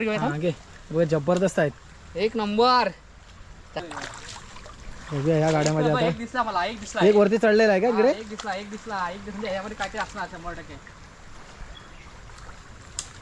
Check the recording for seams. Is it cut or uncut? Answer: cut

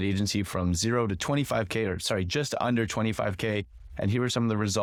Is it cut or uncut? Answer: uncut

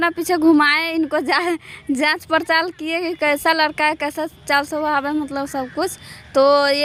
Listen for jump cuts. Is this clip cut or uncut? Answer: uncut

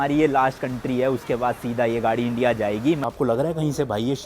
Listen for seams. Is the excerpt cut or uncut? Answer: cut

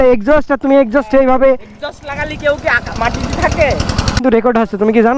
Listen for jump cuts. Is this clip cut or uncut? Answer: cut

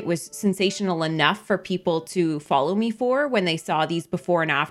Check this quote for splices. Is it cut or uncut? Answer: uncut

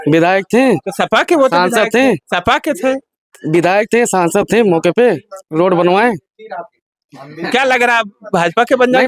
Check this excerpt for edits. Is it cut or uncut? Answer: uncut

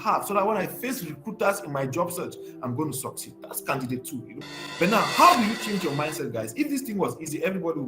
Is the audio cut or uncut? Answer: cut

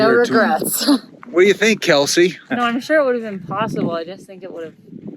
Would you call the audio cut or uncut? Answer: cut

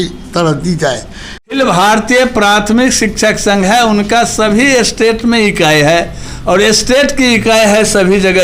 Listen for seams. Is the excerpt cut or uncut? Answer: cut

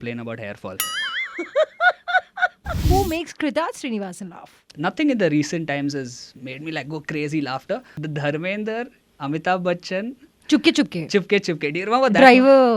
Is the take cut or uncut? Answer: uncut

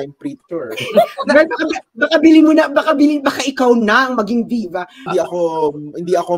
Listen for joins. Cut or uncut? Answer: cut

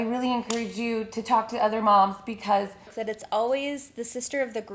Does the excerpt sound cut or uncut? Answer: cut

